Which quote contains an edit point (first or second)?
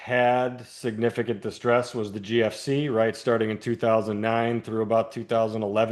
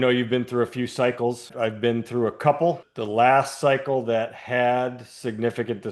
second